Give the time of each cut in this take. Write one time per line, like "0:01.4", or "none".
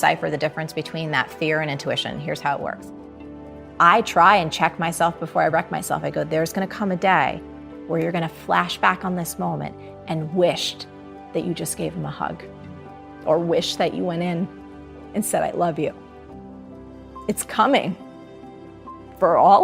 0:03.4